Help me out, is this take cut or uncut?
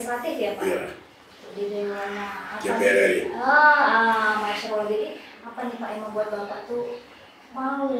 uncut